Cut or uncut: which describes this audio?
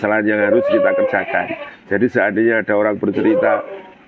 uncut